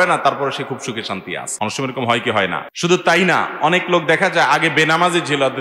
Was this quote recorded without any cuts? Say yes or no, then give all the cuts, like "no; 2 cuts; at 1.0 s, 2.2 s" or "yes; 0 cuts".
no; 2 cuts; at 1.4 s, 2.7 s